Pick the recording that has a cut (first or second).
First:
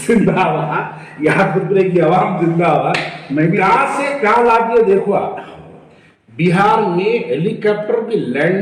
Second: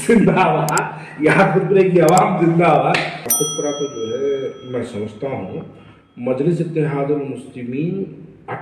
second